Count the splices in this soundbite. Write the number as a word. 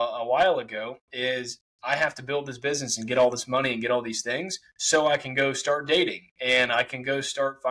zero